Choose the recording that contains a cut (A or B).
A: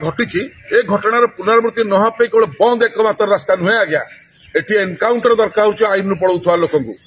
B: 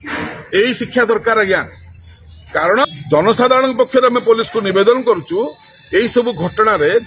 B